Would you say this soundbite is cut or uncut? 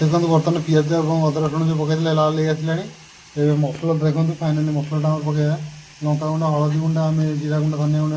uncut